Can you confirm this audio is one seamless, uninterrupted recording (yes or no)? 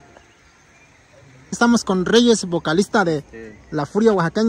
no